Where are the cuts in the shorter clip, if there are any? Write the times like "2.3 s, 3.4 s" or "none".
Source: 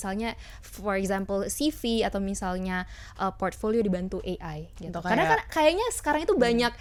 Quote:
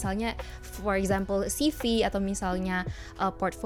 none